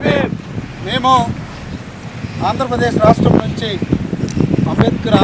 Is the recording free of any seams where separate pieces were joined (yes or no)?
yes